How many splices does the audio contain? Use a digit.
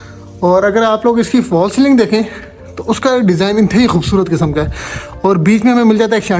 0